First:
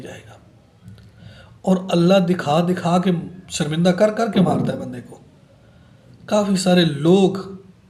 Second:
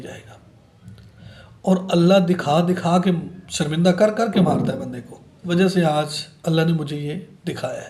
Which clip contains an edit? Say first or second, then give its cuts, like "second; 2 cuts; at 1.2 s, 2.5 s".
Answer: second; 1 cut; at 5.4 s